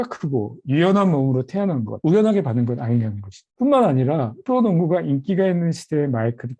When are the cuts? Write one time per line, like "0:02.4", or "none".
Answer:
none